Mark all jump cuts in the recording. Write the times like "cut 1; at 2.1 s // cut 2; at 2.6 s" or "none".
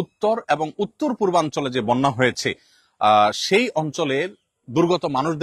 none